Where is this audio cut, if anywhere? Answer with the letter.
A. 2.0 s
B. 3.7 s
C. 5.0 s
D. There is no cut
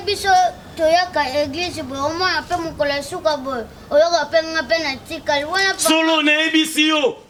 D